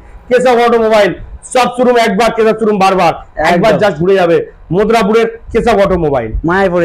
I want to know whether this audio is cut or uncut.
uncut